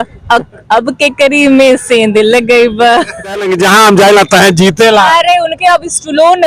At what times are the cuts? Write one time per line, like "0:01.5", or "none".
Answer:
0:03.5